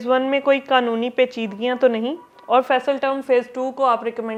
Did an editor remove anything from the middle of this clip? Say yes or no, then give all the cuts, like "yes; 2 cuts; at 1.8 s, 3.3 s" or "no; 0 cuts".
no; 0 cuts